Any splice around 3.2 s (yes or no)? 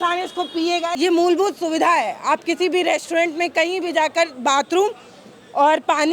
no